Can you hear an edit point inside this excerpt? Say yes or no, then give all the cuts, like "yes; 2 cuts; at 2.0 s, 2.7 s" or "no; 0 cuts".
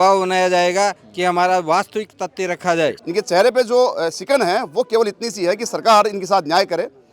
yes; 1 cut; at 3.0 s